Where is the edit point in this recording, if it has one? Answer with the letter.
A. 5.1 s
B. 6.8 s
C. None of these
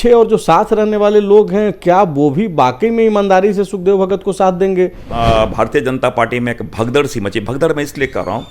A